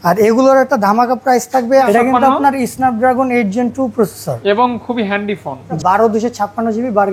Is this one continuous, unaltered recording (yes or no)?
no